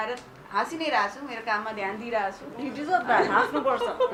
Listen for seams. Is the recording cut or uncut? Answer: uncut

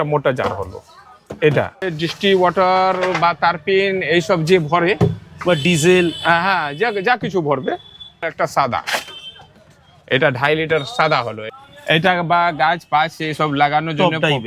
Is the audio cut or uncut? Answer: cut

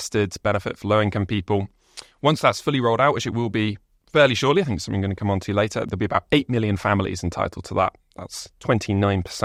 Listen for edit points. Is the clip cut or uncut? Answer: uncut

